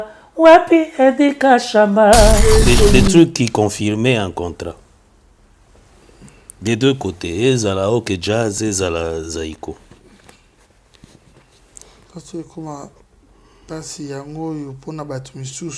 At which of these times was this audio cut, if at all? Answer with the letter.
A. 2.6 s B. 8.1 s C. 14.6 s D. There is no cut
A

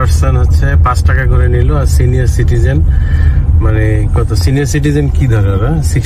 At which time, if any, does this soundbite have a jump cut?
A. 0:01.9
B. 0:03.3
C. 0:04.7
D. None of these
D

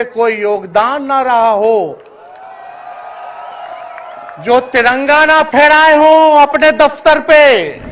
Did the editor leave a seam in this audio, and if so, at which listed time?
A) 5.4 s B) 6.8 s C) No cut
C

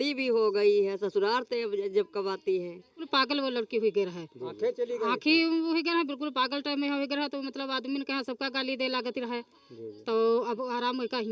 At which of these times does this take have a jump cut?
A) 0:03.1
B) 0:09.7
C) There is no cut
A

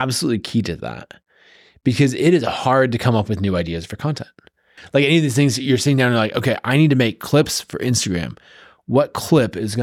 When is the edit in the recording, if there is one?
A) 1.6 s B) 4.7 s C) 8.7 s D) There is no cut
B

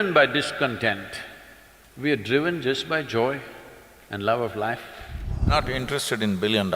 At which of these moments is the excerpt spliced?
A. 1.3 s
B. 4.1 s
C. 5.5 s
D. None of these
C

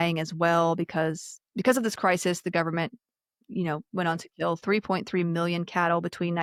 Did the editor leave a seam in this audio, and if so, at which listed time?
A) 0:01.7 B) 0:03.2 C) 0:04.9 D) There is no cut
D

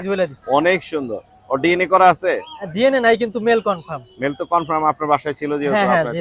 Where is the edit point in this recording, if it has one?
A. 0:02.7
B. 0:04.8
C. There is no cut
C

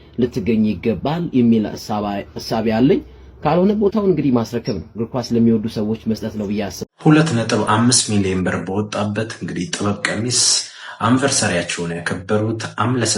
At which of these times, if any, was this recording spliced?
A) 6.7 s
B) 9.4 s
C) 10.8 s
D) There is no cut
A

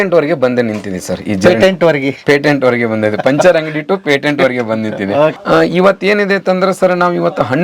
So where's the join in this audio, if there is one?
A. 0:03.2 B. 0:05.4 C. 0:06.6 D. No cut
B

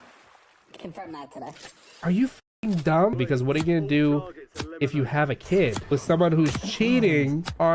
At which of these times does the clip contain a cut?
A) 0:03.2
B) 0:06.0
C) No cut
A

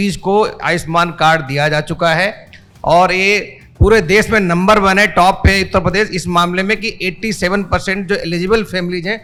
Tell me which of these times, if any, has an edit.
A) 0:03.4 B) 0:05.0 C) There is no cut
C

